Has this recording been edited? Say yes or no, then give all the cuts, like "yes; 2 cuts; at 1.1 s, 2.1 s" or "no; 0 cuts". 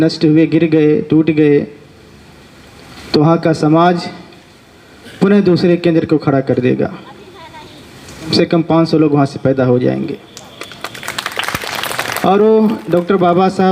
yes; 1 cut; at 8.3 s